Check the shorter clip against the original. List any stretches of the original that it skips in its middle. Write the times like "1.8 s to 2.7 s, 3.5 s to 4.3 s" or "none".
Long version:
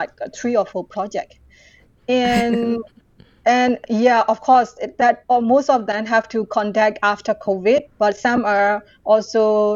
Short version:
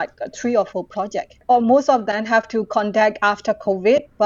1.4 s to 5.2 s